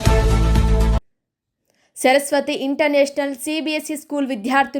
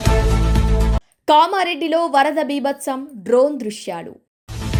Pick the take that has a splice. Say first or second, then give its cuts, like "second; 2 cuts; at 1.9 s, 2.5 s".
first; 1 cut; at 1.1 s